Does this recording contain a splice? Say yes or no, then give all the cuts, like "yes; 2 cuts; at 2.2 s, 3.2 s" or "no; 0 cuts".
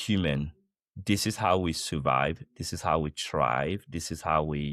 no; 0 cuts